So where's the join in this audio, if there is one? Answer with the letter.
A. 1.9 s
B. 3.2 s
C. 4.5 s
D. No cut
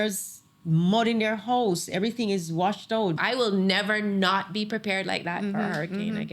B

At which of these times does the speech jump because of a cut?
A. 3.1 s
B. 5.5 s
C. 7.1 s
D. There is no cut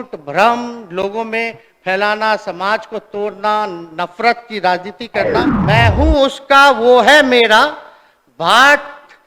B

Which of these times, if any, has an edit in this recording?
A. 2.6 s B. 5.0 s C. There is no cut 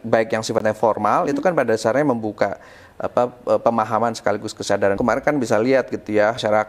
B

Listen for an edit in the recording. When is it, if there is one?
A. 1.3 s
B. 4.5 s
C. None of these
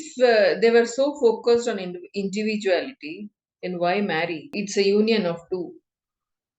B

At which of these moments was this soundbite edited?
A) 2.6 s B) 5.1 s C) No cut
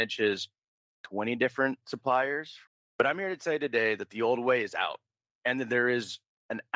A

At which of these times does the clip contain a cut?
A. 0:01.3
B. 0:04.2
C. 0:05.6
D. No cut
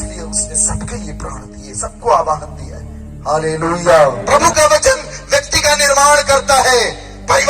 B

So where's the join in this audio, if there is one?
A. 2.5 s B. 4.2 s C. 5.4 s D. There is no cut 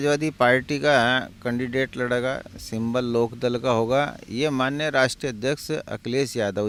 D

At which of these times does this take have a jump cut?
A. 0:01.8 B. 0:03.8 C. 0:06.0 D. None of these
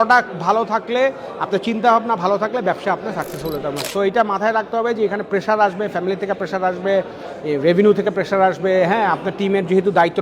B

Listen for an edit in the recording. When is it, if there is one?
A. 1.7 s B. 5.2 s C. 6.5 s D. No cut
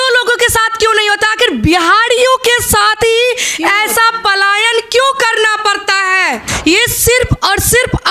C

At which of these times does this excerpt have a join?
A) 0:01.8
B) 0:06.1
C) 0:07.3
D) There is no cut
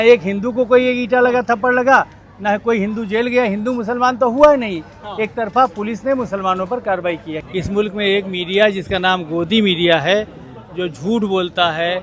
C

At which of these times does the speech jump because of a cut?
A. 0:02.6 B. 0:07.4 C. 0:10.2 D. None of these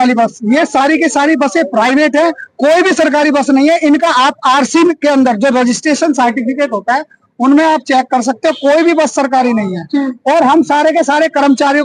D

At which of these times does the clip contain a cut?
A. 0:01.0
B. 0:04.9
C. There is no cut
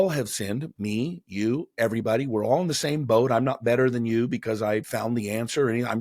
B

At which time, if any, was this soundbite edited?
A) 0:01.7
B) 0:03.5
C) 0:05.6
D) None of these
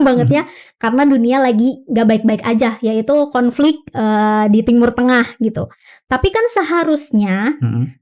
D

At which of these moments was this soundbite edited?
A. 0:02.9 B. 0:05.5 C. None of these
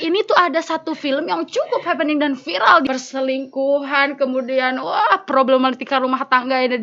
A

